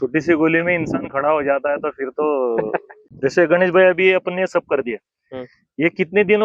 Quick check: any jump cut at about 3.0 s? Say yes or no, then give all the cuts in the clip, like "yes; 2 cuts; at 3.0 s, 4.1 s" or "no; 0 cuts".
yes; 1 cut; at 3.0 s